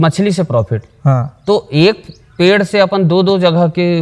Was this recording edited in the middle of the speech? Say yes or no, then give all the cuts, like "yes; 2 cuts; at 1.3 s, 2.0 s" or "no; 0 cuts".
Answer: no; 0 cuts